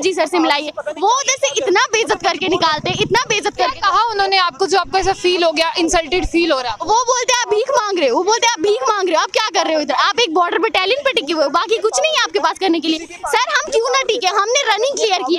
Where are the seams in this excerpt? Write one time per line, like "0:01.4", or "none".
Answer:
none